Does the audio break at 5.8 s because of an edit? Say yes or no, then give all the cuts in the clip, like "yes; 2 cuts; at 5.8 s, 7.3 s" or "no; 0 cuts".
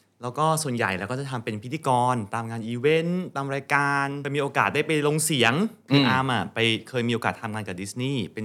yes; 2 cuts; at 4.2 s, 5.8 s